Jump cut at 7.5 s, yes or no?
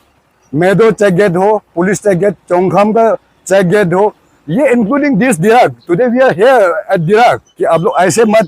yes